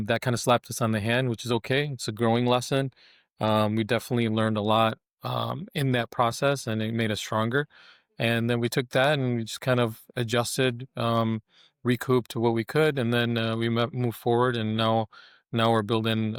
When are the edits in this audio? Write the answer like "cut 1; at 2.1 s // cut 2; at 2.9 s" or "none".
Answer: none